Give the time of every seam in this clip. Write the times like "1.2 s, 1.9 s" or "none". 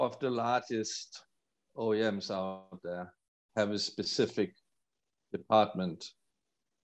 none